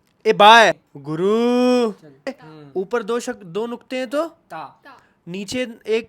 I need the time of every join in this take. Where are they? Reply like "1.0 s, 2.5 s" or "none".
0.9 s, 2.3 s